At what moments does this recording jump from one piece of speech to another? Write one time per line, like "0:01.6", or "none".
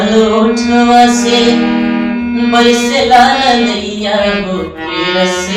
none

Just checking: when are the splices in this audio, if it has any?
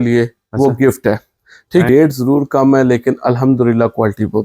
0:01.9

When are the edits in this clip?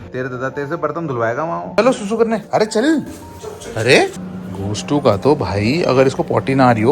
0:01.7

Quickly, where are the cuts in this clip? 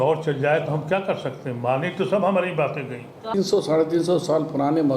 0:03.3

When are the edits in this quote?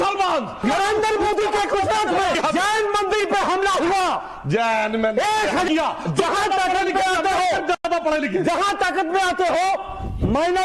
0:01.0
0:02.4
0:05.7

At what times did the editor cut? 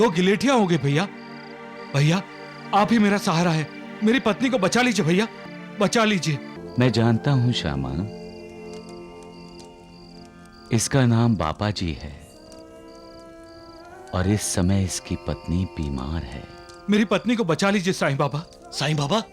0:06.6

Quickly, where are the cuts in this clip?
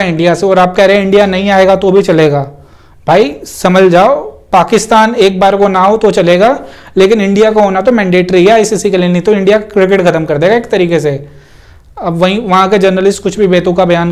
none

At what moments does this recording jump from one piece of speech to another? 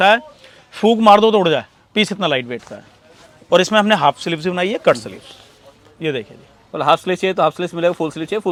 none

